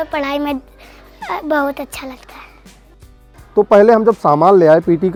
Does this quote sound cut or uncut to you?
uncut